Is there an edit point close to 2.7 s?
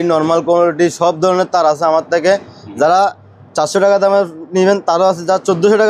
no; 0 cuts

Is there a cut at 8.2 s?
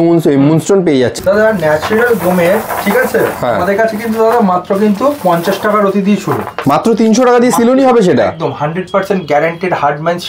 no; 2 cuts; at 1.2 s, 6.5 s

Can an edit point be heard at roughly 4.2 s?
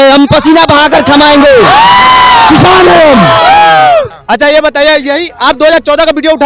yes; 1 cut; at 4.2 s

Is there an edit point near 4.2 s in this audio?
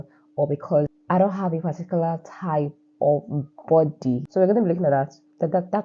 no; 0 cuts

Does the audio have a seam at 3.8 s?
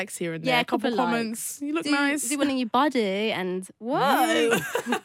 no; 0 cuts

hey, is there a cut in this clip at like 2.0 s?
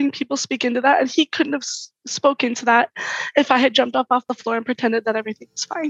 no; 1 cut; at 4.3 s

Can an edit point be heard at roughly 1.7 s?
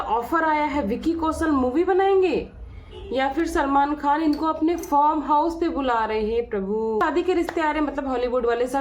no; 1 cut; at 7.0 s

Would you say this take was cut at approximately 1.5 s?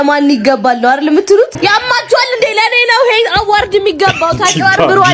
yes; 1 cut; at 1.5 s

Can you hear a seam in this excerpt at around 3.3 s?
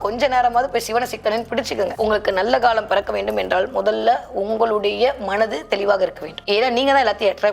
no; 2 cuts; at 1.9 s, 6.3 s

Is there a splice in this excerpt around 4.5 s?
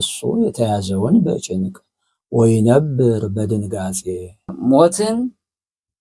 yes; 1 cut; at 4.5 s

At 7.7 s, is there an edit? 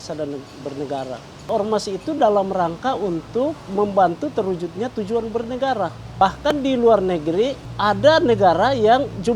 yes; 3 cuts; at 1.5 s, 6.2 s, 7.7 s

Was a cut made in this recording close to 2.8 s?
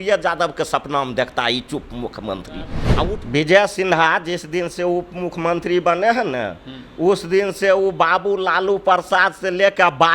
yes; 1 cut; at 2.8 s

